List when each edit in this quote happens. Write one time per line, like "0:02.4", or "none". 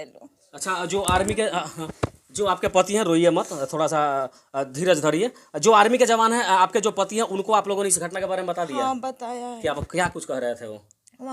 none